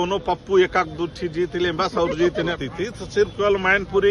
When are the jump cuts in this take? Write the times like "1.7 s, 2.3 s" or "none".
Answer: 2.6 s